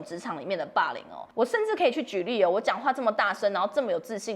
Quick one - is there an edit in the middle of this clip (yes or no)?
yes